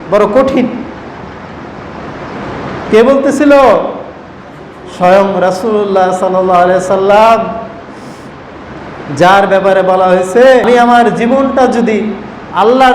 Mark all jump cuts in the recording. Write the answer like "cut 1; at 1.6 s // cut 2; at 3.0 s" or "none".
cut 1; at 10.6 s